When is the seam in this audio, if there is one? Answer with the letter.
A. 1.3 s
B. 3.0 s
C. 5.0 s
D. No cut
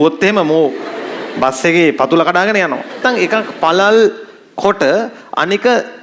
B